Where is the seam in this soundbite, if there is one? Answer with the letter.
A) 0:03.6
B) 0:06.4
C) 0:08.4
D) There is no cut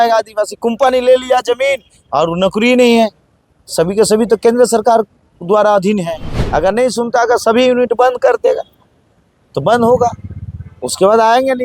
B